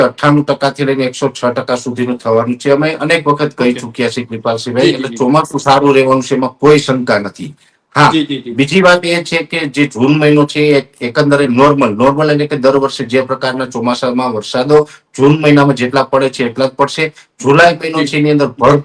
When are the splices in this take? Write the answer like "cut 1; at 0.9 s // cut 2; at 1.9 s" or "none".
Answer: none